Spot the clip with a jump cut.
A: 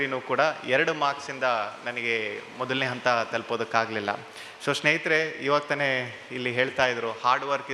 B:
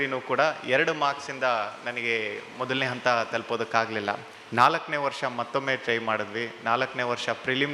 B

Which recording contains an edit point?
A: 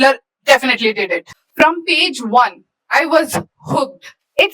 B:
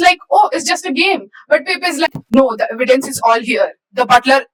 A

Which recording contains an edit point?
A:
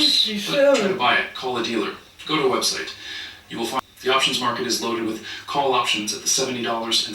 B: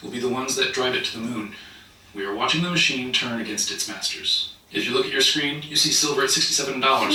A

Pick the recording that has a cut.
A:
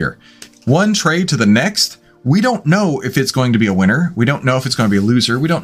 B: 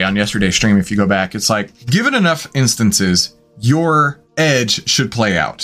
B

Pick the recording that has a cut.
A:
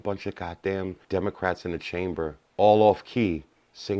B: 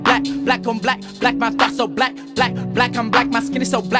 A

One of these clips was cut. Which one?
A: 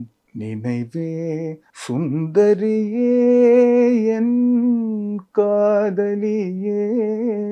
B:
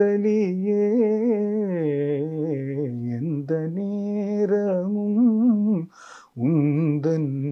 A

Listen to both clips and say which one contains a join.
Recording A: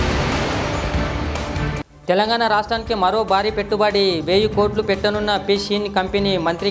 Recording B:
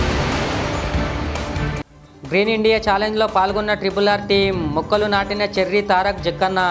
A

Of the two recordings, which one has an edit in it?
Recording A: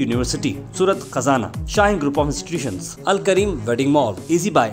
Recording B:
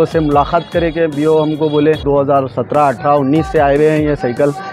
B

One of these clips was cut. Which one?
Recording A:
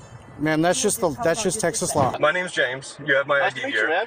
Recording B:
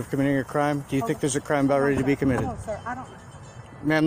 A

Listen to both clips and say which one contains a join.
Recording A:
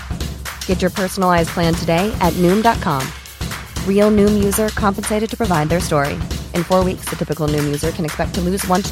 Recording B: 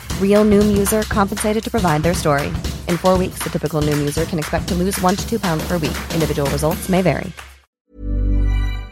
B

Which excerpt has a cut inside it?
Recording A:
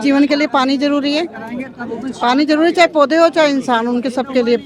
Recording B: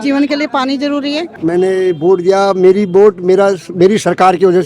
B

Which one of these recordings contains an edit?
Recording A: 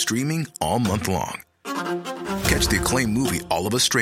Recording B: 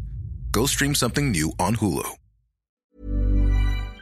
B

